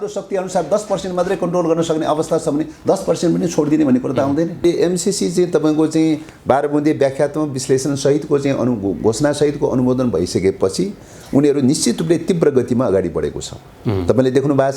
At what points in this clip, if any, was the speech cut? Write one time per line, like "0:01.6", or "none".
0:04.6